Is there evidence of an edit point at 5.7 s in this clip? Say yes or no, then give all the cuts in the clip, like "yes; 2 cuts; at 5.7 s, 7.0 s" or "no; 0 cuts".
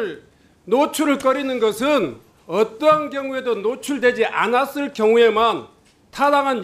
no; 0 cuts